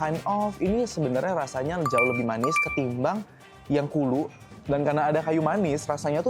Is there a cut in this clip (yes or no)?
no